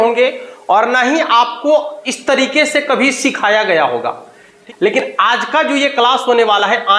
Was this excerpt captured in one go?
no; 1 cut; at 4.6 s

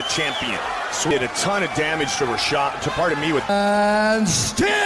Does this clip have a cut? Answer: no; 0 cuts

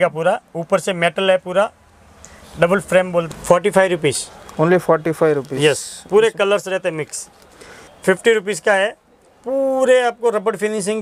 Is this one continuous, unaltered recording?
yes; 0 cuts

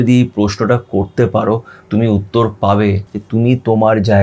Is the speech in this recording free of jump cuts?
no; 1 cut; at 3.1 s

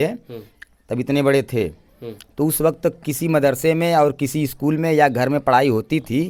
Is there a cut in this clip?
no; 0 cuts

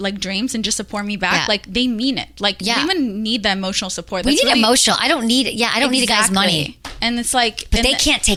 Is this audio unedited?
yes; 0 cuts

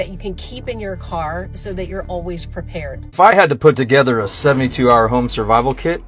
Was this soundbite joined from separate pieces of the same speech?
yes; 1 cut; at 3.0 s

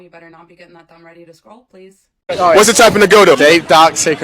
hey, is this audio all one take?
no; 1 cut; at 2.1 s

